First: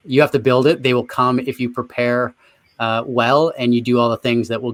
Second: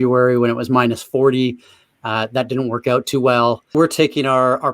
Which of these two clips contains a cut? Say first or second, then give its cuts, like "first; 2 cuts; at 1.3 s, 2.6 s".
second; 1 cut; at 3.8 s